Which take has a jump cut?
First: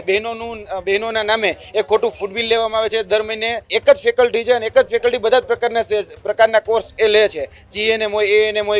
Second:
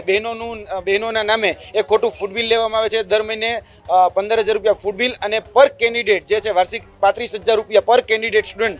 first; 1 cut; at 3.7 s

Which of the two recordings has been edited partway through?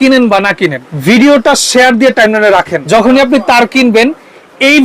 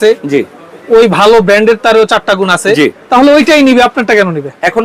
first; 2 cuts; at 0.9 s, 2.8 s

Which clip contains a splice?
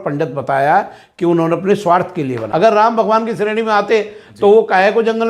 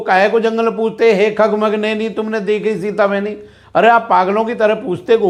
first; 1 cut; at 2.4 s

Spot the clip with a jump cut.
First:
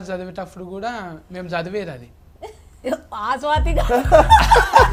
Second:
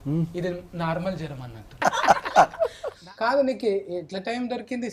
second; 2 cuts; at 1.8 s, 3.0 s

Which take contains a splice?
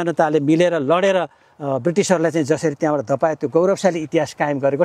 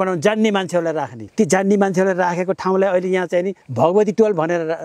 second; 2 cuts; at 1.2 s, 3.6 s

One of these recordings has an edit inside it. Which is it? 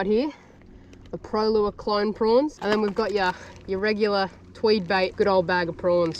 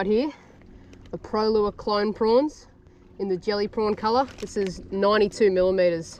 first; 2 cuts; at 2.6 s, 5.1 s

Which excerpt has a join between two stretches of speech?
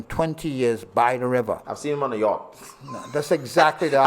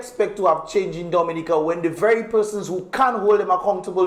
first; 1 cut; at 1.7 s

